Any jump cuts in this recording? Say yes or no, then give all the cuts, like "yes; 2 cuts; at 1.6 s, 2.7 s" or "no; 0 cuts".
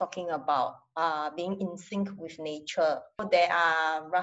yes; 1 cut; at 3.2 s